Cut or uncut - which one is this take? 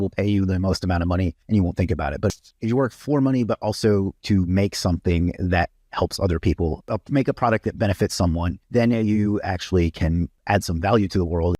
cut